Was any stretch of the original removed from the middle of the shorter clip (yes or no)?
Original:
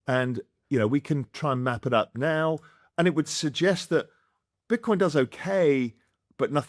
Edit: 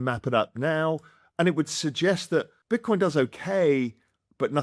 yes